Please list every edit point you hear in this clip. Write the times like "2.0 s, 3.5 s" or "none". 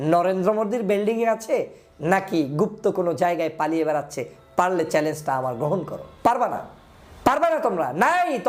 none